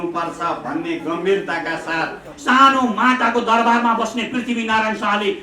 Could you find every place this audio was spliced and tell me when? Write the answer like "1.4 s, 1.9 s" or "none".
2.3 s